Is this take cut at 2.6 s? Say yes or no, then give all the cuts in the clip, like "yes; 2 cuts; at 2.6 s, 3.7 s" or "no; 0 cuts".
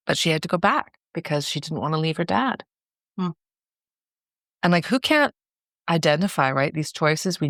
no; 0 cuts